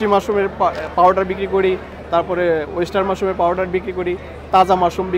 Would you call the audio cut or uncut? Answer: uncut